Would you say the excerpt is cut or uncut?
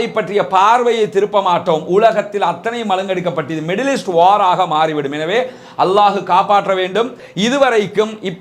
cut